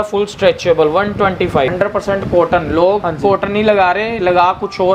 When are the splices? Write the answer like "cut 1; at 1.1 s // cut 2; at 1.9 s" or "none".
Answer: cut 1; at 1.7 s